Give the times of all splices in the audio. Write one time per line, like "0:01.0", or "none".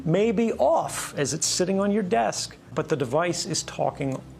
0:02.7